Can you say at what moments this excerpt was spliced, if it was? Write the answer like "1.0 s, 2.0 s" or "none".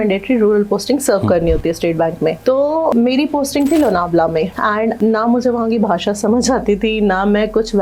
none